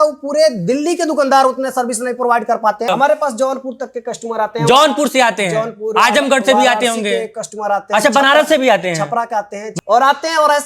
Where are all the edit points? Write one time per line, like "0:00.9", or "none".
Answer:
0:02.9
0:09.6